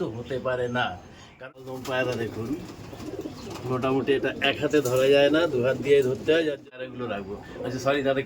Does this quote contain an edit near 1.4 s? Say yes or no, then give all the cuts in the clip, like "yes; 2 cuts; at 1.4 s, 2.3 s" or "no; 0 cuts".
yes; 2 cuts; at 1.4 s, 6.9 s